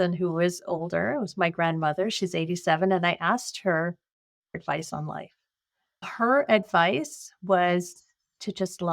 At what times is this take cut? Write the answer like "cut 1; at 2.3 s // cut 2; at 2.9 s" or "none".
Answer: cut 1; at 4.6 s // cut 2; at 6.0 s